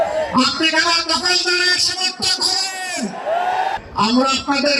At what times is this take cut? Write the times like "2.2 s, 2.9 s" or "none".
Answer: 3.8 s